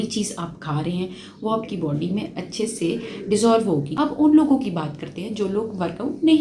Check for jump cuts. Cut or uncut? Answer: cut